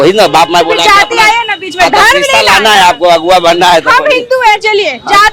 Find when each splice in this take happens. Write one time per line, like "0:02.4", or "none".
none